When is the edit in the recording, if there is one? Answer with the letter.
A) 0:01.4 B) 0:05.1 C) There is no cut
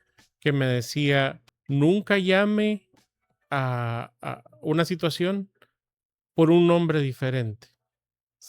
A